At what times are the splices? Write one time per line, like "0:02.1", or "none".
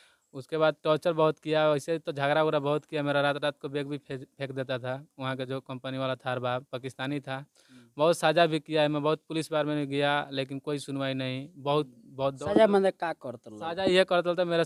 none